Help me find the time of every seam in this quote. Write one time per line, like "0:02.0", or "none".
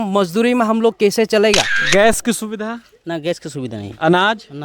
0:01.7